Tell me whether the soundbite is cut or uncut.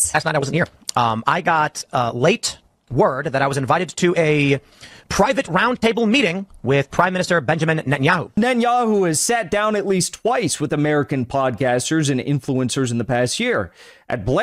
cut